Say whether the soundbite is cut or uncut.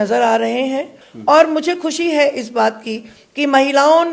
cut